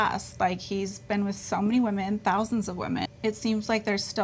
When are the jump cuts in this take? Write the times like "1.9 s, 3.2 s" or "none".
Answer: 3.0 s